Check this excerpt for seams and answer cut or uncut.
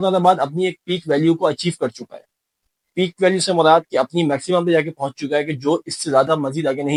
uncut